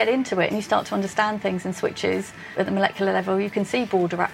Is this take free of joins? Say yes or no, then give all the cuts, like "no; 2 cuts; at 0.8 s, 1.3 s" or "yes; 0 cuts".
no; 1 cut; at 2.5 s